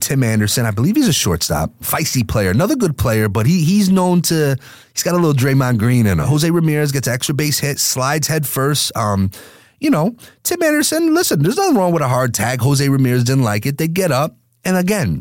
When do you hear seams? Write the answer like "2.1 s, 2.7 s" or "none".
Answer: 1.8 s, 6.2 s